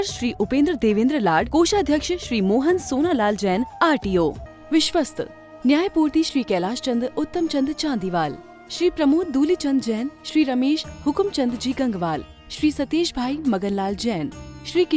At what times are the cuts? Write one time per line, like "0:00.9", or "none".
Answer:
0:04.5